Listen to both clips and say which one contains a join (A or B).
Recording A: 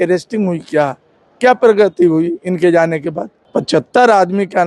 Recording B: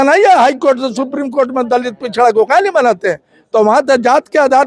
A